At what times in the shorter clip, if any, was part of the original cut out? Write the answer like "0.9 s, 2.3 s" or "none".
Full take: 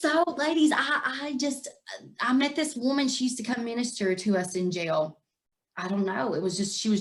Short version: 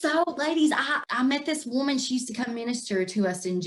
1.0 s